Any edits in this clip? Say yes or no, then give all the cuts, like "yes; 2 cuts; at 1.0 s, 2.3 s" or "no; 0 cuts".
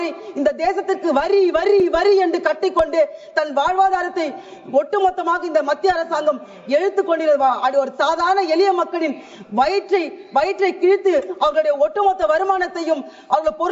no; 0 cuts